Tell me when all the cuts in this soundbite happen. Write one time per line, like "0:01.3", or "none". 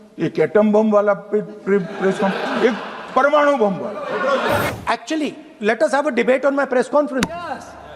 0:04.7